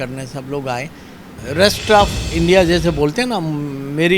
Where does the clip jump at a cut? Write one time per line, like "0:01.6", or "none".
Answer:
0:01.3